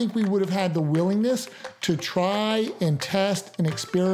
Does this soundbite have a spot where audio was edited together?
no; 0 cuts

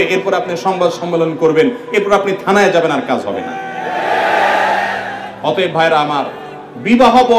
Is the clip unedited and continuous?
yes; 0 cuts

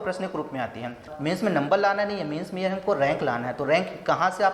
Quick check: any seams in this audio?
yes; 1 cut; at 1.1 s

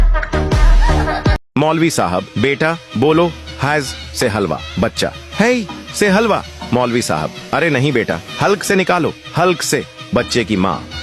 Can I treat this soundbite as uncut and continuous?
no; 1 cut; at 1.4 s

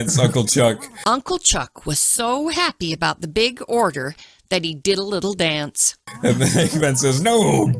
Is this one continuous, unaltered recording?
yes; 0 cuts

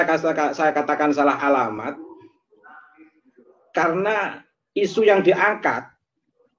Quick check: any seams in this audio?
no; 0 cuts

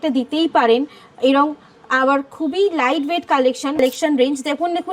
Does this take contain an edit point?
yes; 1 cut; at 3.8 s

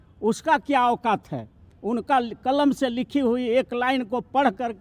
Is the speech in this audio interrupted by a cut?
no; 0 cuts

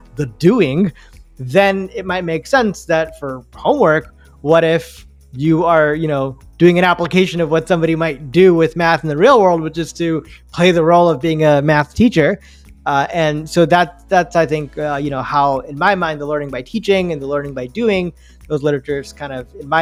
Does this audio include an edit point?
no; 0 cuts

